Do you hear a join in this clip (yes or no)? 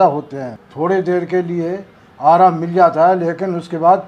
no